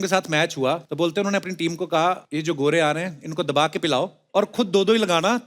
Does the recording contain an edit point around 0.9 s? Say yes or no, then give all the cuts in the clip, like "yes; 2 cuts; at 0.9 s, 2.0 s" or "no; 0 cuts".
yes; 3 cuts; at 0.9 s, 2.2 s, 4.2 s